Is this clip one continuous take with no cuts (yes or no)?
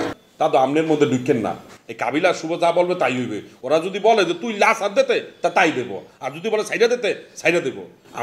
yes